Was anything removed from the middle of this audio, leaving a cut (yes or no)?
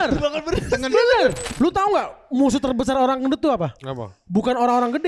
yes